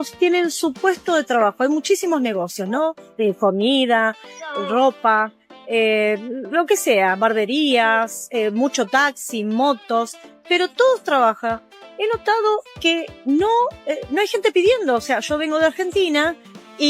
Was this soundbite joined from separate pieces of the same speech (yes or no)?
no